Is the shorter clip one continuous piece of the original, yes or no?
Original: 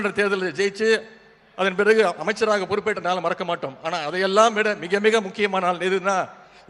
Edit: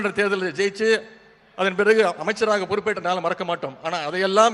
yes